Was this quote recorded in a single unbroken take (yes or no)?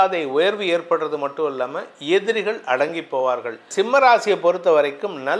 no